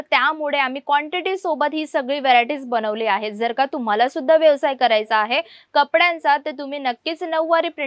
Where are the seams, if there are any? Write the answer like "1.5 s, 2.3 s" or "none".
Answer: none